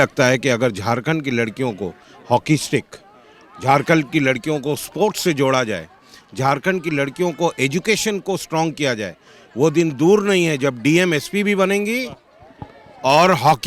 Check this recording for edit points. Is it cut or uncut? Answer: uncut